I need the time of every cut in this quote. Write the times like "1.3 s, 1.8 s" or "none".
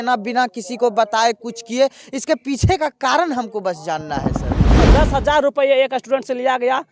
4.8 s